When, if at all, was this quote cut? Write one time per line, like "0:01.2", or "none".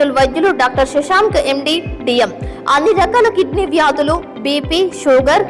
none